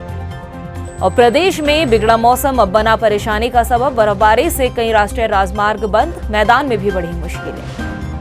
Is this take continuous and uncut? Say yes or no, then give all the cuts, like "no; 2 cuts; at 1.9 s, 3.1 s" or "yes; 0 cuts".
yes; 0 cuts